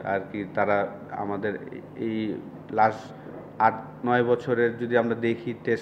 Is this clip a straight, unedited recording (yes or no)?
yes